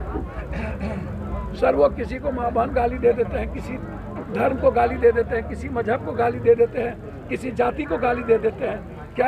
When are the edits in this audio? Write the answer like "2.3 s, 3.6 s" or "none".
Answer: none